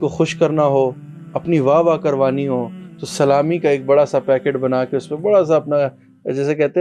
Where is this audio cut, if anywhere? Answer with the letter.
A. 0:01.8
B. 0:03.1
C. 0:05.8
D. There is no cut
D